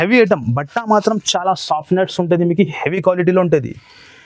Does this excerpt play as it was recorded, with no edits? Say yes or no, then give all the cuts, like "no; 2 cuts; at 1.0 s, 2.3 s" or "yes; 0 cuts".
yes; 0 cuts